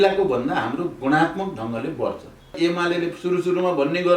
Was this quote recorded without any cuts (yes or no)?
no